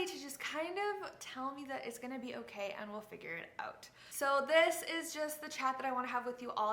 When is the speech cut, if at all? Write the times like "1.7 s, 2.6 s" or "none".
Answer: none